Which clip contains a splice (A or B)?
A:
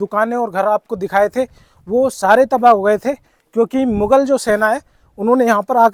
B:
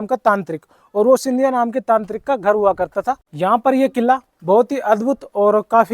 B